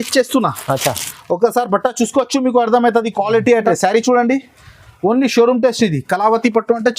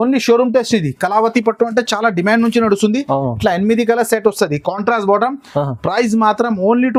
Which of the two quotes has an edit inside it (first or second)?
first